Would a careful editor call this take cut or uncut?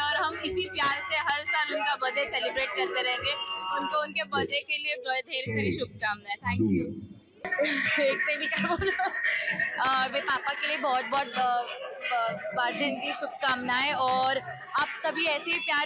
cut